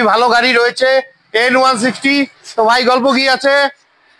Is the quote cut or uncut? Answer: uncut